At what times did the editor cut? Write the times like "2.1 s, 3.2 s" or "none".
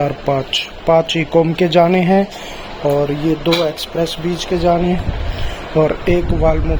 none